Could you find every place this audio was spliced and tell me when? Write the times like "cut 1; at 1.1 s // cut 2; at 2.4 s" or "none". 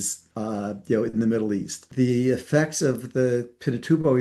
cut 1; at 1.9 s